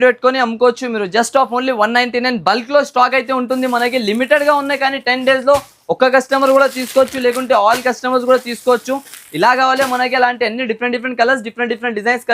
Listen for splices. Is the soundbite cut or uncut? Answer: uncut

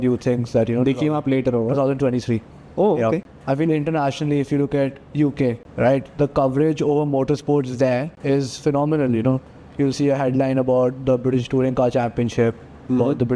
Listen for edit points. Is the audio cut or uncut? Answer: cut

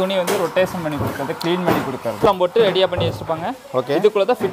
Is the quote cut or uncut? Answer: cut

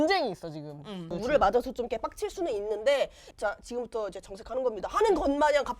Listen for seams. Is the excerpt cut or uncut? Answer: cut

